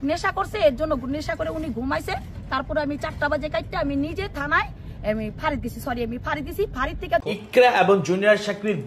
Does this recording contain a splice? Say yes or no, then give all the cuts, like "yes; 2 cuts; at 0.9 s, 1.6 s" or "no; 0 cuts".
yes; 1 cut; at 7.4 s